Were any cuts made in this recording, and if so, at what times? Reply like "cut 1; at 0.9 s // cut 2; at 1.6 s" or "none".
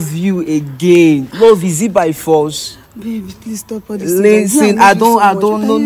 none